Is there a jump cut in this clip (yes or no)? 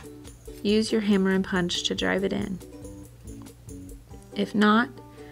yes